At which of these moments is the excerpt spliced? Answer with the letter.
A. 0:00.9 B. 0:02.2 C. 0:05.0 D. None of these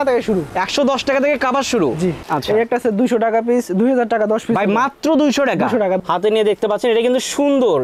B